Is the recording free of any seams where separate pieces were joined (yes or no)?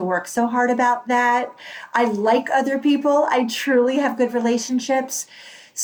yes